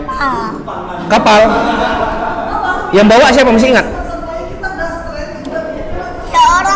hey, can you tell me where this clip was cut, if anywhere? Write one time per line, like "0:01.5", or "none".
none